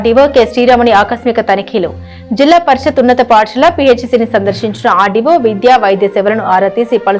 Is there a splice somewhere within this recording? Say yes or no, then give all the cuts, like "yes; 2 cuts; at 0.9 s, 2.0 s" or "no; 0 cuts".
no; 0 cuts